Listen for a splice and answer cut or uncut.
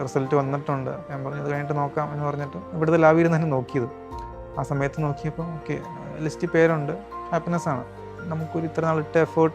cut